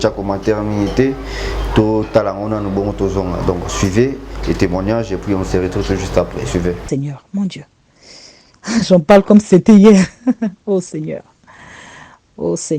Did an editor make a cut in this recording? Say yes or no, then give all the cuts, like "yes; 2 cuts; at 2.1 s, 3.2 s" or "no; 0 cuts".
yes; 1 cut; at 6.8 s